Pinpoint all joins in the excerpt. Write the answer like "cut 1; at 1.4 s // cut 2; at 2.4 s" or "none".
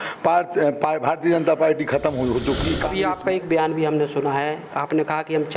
cut 1; at 2.8 s